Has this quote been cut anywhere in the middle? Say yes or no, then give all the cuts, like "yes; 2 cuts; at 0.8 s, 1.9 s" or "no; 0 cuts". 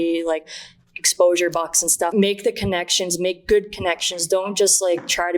yes; 1 cut; at 2.1 s